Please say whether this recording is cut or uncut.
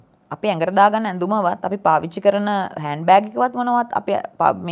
uncut